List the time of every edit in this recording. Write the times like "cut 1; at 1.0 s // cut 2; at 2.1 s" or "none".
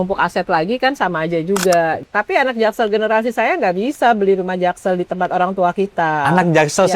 cut 1; at 2.0 s